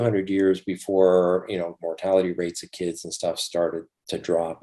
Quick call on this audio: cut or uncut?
uncut